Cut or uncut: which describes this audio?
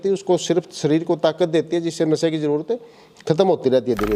uncut